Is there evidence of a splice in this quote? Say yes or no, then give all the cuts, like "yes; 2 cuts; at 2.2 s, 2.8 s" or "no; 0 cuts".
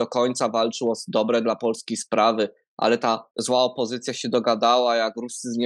yes; 1 cut; at 3.3 s